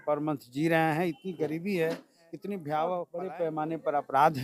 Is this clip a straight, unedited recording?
no; 1 cut; at 3.1 s

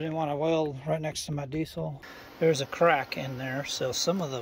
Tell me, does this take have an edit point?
yes; 1 cut; at 2.1 s

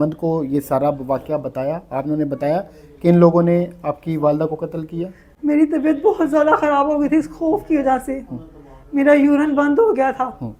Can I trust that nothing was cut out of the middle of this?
yes; 0 cuts

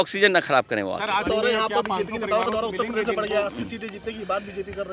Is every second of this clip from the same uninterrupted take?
no; 1 cut; at 1.2 s

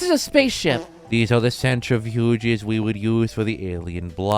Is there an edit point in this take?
yes; 1 cut; at 0.9 s

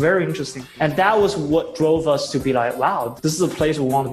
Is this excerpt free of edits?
yes; 0 cuts

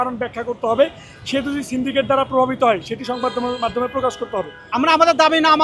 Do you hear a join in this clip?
yes; 1 cut; at 4.7 s

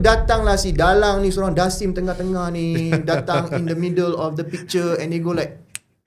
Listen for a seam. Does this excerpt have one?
no; 0 cuts

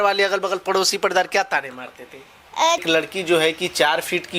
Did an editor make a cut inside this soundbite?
yes; 1 cut; at 2.8 s

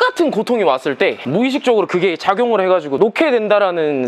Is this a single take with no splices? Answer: no; 2 cuts; at 1.2 s, 2.9 s

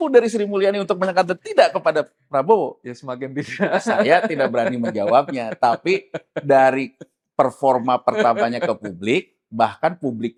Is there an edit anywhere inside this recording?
no; 0 cuts

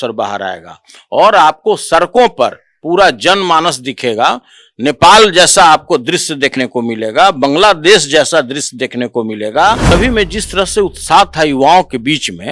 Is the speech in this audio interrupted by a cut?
yes; 1 cut; at 9.9 s

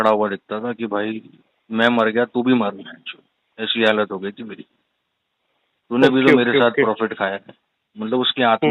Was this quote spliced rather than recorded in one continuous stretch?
no; 0 cuts

